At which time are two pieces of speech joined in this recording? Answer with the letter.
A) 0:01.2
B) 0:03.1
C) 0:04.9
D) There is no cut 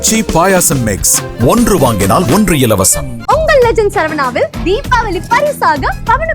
B